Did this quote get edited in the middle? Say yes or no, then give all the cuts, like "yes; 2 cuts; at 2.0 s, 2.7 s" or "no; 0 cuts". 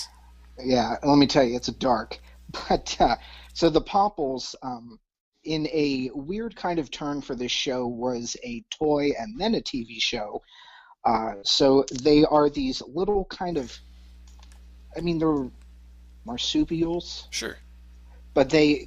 yes; 1 cut; at 15.6 s